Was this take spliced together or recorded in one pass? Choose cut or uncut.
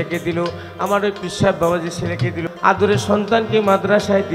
cut